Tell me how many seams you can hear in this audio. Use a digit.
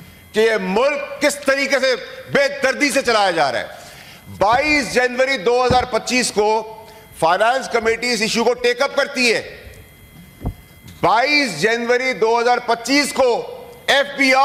0